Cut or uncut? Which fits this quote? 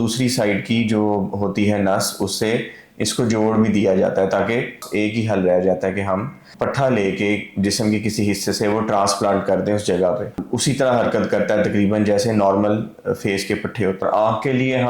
cut